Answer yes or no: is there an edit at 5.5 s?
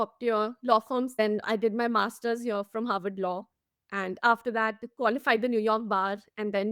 no